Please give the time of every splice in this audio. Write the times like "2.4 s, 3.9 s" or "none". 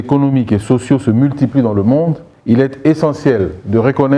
2.3 s